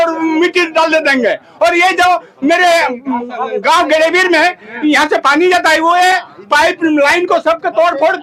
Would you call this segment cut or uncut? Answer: uncut